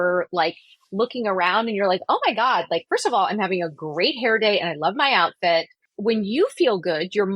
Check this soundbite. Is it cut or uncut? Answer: cut